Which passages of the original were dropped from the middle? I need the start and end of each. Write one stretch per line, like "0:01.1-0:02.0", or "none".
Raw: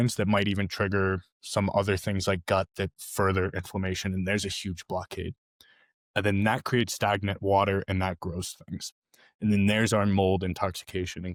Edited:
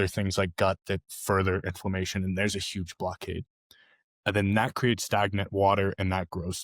none